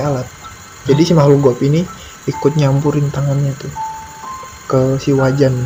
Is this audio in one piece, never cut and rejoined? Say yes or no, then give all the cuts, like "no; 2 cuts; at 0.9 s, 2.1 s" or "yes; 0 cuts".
yes; 0 cuts